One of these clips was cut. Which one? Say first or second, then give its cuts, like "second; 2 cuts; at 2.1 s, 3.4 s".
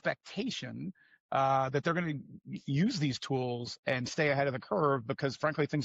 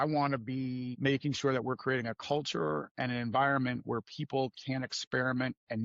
second; 1 cut; at 0.9 s